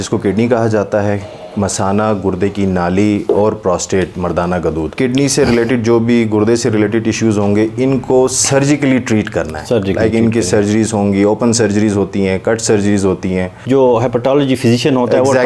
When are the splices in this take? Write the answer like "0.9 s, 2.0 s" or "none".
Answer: 4.9 s, 13.6 s